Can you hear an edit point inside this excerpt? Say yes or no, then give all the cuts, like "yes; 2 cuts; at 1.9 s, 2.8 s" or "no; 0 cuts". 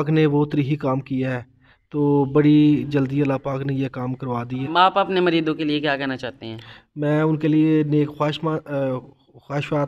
yes; 1 cut; at 4.7 s